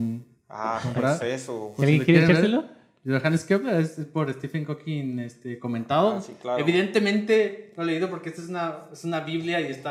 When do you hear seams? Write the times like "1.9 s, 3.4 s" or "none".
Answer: none